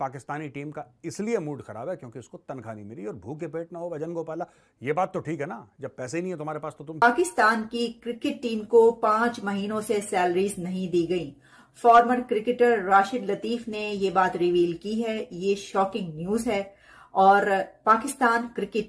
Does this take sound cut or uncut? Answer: cut